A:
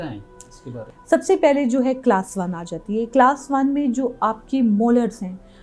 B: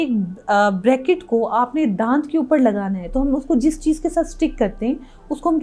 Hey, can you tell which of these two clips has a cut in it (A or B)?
A